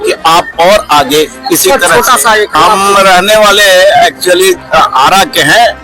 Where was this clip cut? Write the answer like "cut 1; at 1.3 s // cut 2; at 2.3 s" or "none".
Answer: cut 1; at 2.6 s